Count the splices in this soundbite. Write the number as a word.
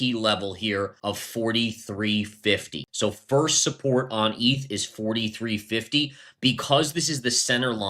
two